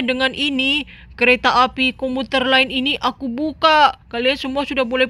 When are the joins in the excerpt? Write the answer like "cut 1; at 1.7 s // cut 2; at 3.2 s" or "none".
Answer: none